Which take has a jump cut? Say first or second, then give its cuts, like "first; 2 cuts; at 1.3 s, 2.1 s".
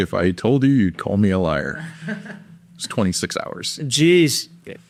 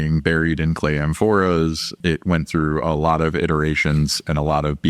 second; 1 cut; at 1.9 s